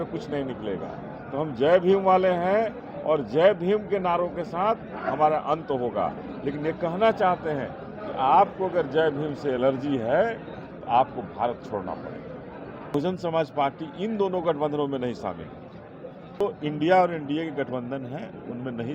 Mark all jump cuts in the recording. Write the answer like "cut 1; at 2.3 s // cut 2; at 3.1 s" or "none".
cut 1; at 12.9 s